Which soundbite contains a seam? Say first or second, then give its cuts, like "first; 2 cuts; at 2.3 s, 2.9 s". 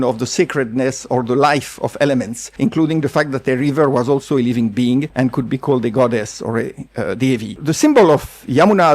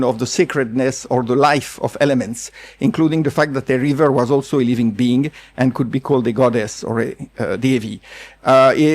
first; 3 cuts; at 2.4 s, 5.1 s, 7.6 s